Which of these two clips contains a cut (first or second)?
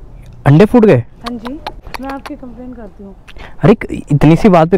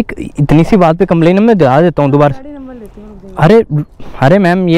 first